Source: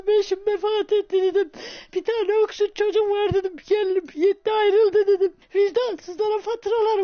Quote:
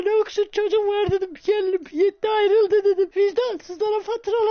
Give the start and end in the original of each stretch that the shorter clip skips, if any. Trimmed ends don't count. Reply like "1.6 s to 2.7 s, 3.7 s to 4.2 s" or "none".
5.3 s to 5.5 s